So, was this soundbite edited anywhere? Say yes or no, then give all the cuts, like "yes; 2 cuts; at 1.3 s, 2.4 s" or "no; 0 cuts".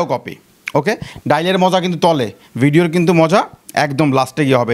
yes; 1 cut; at 1.0 s